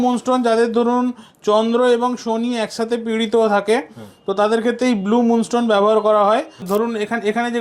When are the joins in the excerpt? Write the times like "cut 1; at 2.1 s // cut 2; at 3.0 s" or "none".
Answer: cut 1; at 6.6 s